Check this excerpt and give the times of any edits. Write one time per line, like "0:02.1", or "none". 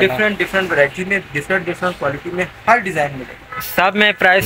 none